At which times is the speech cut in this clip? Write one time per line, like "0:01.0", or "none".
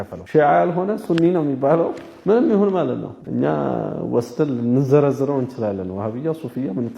0:02.1
0:03.2